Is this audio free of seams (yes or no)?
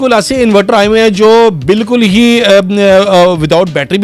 yes